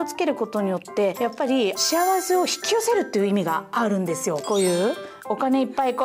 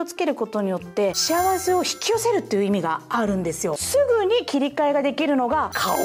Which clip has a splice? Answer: second; 2 cuts; at 1.2 s, 3.8 s

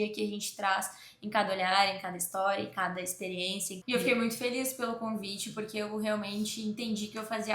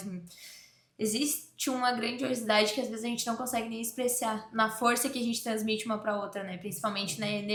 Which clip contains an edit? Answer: first; 1 cut; at 3.7 s

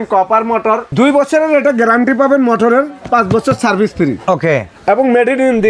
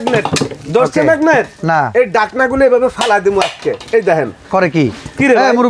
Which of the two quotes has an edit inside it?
first; 2 cuts; at 0.9 s, 4.7 s

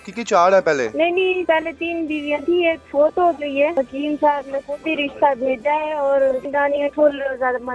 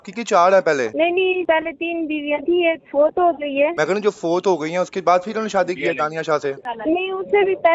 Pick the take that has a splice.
first; 2 cuts; at 3.7 s, 6.5 s

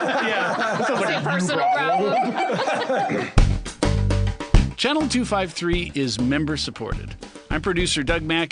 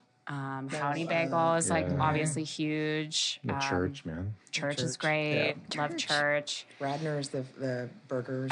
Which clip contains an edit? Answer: first; 1 cut; at 3.3 s

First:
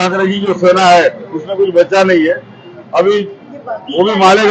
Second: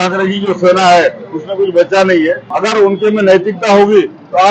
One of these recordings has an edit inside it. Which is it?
second; 1 cut; at 2.5 s

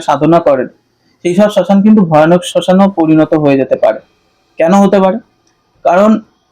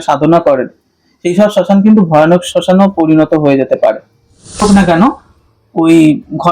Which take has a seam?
second; 1 cut; at 4.6 s

